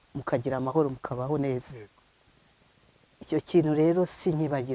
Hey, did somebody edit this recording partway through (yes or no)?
no